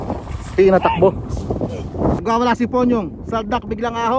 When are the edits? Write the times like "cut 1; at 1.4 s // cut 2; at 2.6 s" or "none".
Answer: cut 1; at 2.2 s